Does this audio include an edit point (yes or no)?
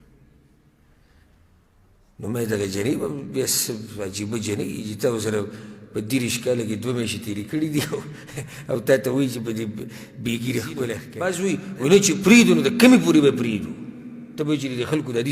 yes